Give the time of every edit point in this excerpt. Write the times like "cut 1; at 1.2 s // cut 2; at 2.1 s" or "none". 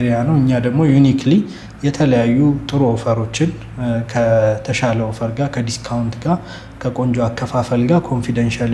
none